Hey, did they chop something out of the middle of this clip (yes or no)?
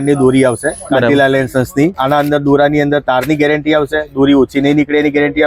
yes